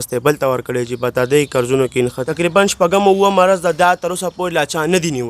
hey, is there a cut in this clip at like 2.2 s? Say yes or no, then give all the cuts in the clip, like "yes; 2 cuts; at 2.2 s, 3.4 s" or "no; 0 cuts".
yes; 1 cut; at 2.2 s